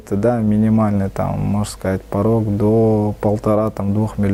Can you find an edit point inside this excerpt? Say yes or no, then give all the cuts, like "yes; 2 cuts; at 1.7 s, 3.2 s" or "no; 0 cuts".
no; 0 cuts